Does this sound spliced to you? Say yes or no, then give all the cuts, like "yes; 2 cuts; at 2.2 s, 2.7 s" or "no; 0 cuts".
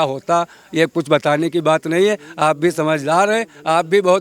no; 0 cuts